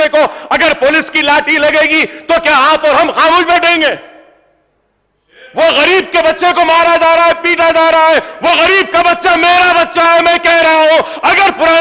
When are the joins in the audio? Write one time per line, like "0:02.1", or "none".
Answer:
none